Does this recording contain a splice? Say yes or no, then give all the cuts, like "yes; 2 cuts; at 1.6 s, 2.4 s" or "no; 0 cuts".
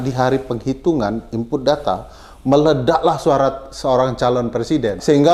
no; 0 cuts